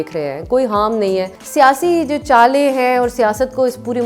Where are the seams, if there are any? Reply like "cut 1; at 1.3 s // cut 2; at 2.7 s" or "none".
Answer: cut 1; at 1.4 s